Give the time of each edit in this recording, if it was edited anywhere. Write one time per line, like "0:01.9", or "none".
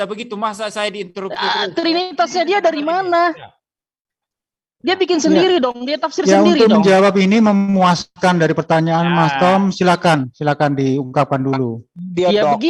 none